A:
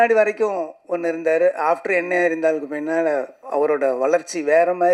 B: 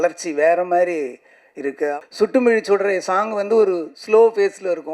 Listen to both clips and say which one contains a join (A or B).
B